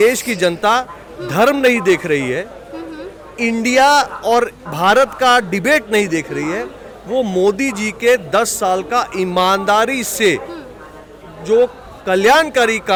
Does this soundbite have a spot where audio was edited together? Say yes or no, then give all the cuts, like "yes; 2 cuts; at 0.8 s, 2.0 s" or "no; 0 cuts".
no; 0 cuts